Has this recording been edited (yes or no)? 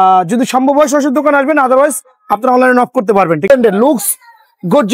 yes